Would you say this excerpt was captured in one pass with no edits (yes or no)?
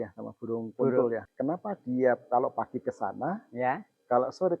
no